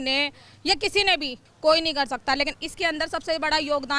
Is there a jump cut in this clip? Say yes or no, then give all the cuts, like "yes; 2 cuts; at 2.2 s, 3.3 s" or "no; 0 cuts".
yes; 1 cut; at 1.4 s